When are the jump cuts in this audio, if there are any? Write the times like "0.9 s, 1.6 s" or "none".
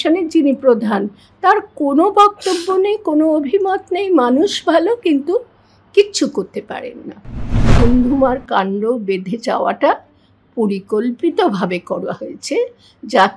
7.7 s